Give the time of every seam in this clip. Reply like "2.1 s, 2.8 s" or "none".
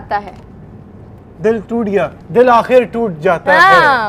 2.2 s